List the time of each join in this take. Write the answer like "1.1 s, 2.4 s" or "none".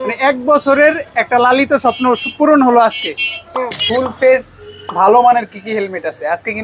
3.8 s